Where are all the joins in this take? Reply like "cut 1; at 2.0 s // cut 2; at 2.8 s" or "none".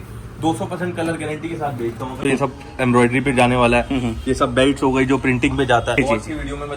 cut 1; at 2.2 s // cut 2; at 6.0 s